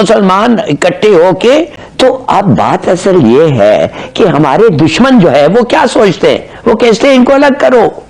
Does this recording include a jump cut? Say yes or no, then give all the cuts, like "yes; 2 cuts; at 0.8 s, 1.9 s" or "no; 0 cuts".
yes; 1 cut; at 1.8 s